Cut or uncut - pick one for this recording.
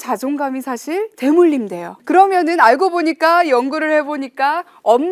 cut